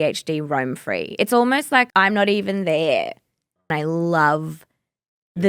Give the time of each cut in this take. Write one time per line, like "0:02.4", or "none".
0:01.9
0:03.7